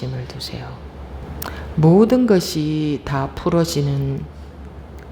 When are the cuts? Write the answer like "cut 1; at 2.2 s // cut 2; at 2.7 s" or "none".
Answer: cut 1; at 1.2 s